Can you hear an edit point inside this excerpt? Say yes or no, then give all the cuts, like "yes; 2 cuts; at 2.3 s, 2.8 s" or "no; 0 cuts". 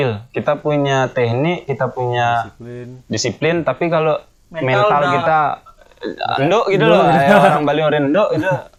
no; 0 cuts